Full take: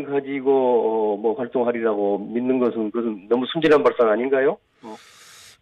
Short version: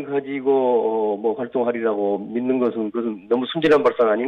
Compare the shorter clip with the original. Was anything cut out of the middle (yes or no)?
no